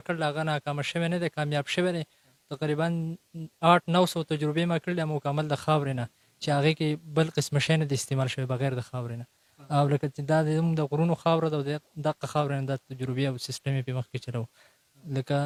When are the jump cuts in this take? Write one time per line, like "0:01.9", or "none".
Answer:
none